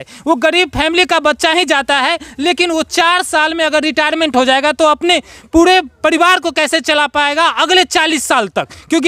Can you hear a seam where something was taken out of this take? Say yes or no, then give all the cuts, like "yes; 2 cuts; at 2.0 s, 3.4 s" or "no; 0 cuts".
no; 0 cuts